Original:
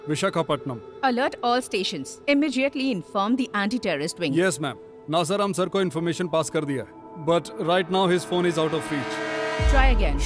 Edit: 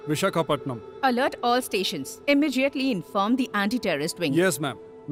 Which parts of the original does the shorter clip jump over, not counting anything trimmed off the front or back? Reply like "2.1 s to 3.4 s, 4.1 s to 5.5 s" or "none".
none